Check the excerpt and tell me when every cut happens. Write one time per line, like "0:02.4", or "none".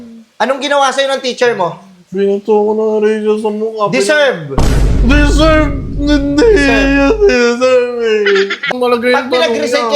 0:08.7